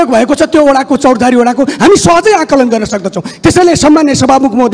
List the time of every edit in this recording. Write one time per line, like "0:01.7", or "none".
none